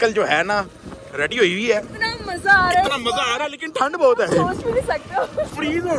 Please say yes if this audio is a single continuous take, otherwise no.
yes